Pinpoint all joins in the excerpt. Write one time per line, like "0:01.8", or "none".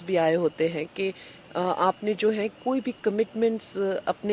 none